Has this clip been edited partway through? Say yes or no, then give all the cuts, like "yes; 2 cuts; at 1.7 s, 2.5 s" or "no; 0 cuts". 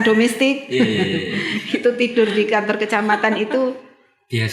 no; 0 cuts